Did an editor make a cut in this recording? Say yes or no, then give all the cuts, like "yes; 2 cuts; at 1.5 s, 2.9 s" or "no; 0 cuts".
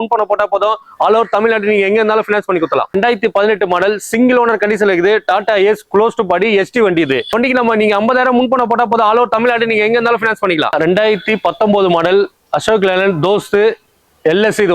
yes; 3 cuts; at 2.9 s, 7.3 s, 10.7 s